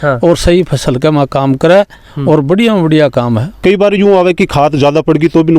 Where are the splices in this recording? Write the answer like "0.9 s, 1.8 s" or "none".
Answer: 3.5 s